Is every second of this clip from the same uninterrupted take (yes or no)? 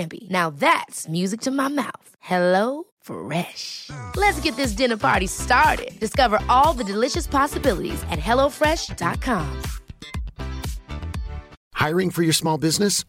no